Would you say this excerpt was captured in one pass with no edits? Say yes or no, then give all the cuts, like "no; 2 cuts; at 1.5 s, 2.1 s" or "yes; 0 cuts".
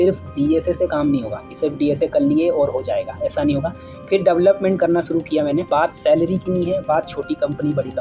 no; 1 cut; at 5.6 s